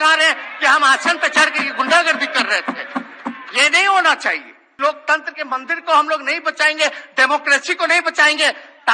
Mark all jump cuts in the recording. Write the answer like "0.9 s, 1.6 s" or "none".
4.6 s